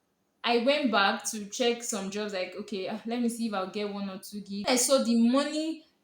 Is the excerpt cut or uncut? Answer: cut